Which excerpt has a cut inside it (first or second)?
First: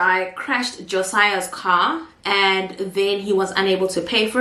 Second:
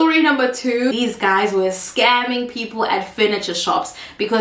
second